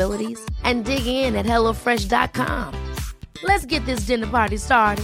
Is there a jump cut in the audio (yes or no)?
no